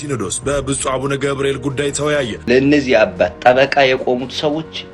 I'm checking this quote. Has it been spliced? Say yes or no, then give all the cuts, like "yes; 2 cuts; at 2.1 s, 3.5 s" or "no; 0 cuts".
yes; 1 cut; at 2.4 s